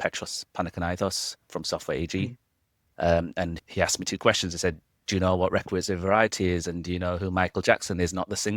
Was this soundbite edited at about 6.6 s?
no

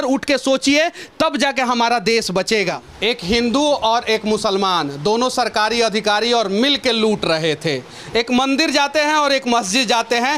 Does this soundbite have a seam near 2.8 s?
yes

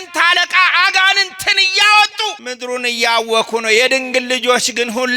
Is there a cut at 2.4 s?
yes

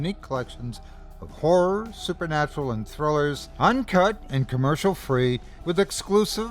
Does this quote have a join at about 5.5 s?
yes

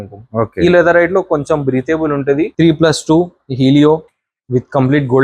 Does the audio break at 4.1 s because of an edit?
no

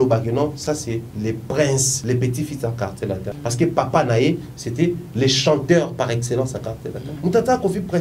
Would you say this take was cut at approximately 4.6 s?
no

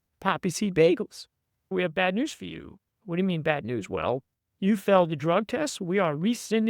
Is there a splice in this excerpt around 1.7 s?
yes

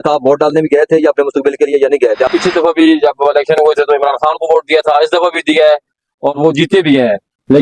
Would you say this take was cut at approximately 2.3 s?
yes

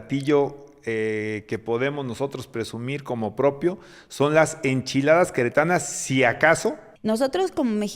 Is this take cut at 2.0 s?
no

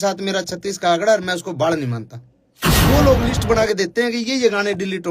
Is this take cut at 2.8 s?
yes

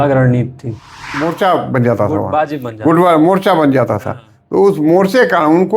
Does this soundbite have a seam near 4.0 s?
no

